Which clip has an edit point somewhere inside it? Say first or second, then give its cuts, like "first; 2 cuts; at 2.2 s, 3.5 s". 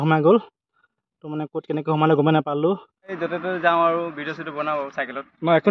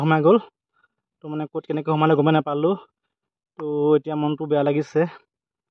first; 1 cut; at 3.2 s